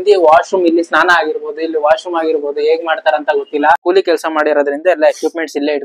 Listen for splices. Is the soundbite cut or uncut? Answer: cut